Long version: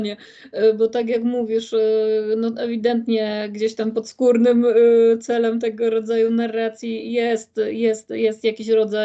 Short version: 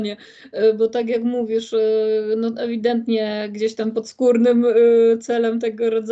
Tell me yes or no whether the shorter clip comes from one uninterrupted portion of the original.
yes